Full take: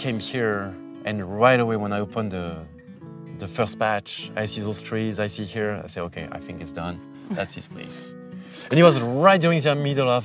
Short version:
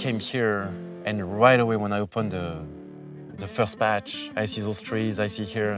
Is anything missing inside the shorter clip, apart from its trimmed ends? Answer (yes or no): no